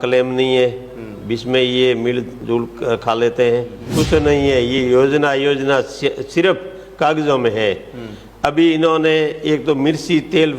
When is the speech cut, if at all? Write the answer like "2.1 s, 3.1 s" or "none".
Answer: 3.8 s